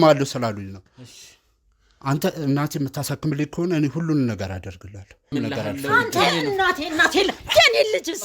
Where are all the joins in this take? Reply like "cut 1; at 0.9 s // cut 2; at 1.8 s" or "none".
cut 1; at 5.3 s